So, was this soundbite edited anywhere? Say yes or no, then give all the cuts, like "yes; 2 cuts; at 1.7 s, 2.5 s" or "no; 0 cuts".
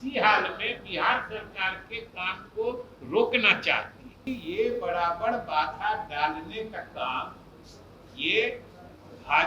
yes; 1 cut; at 4.3 s